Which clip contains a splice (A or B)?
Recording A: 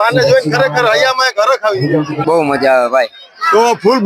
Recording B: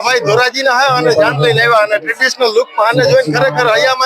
A